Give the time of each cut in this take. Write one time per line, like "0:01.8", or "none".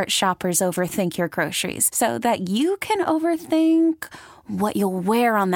none